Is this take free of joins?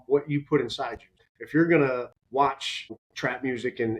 no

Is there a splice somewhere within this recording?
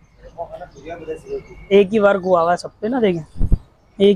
yes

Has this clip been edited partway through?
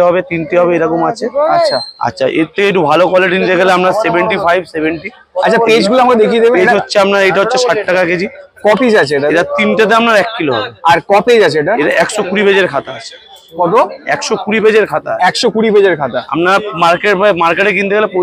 no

